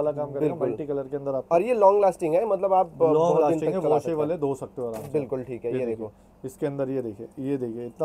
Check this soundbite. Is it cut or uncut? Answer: uncut